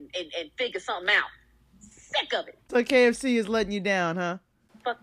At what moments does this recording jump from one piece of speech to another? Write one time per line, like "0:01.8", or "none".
0:02.6